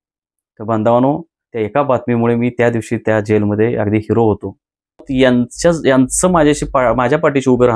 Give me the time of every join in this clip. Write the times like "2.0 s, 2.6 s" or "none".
5.1 s